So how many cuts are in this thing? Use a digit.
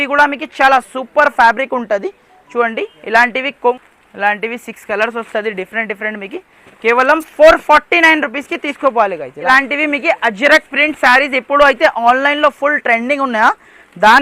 2